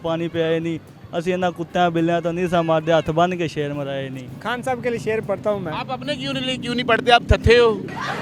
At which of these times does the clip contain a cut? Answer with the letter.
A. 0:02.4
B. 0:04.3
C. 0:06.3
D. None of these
B